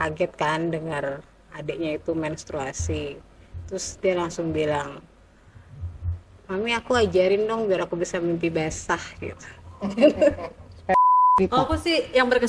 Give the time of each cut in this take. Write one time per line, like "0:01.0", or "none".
0:10.9

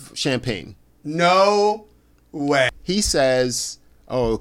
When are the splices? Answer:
0:02.8

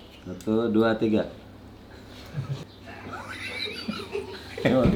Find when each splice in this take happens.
0:02.6

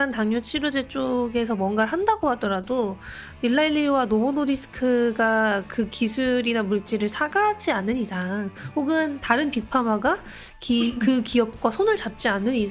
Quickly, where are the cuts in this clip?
none

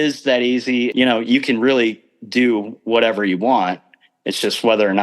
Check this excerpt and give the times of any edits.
0:00.9

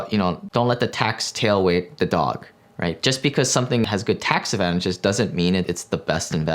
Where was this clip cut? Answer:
0:03.8
0:05.7

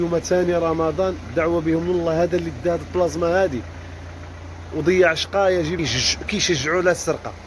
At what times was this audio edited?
0:05.8

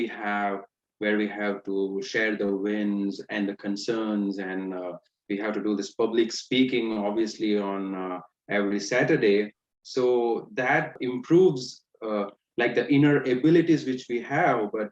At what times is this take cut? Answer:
0:11.0

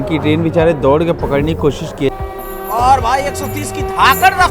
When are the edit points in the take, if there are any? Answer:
0:02.1

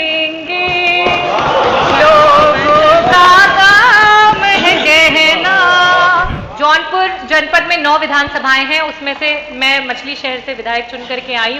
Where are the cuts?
0:06.4

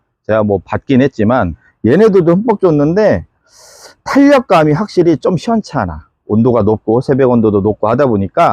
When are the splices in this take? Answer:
0:01.6

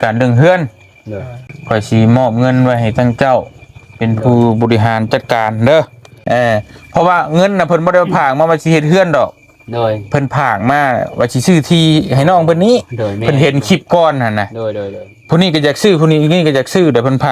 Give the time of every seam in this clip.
0:01.5
0:06.1

